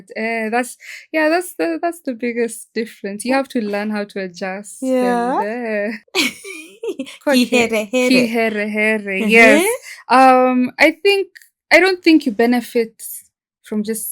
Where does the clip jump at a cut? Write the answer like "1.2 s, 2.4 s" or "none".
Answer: 6.0 s